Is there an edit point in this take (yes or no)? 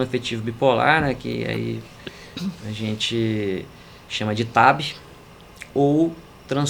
no